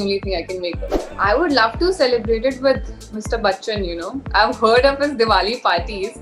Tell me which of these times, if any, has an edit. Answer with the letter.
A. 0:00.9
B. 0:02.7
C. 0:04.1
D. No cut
A